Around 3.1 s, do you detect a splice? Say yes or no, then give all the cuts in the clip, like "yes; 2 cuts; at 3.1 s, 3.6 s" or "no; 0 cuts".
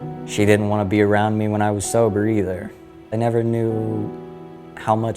yes; 1 cut; at 3.1 s